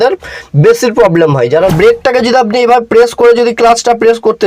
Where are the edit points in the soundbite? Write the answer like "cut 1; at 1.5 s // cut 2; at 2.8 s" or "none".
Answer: cut 1; at 1.7 s